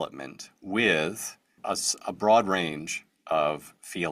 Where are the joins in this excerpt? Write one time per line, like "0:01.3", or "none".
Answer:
0:01.5